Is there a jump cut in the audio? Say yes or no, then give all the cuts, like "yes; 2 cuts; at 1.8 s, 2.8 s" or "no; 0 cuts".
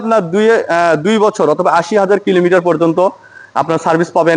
no; 0 cuts